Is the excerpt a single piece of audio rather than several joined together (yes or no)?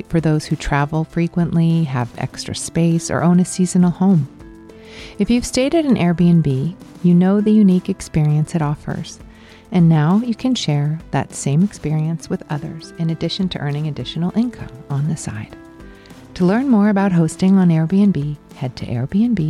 yes